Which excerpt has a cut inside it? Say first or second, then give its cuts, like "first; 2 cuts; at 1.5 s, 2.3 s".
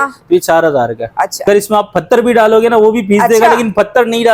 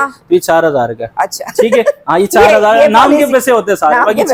first; 1 cut; at 1.4 s